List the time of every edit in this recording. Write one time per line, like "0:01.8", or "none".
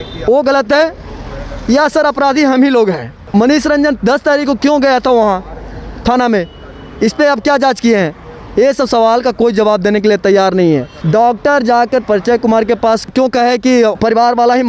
0:03.1
0:10.9